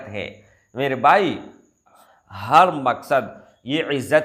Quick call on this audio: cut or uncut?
cut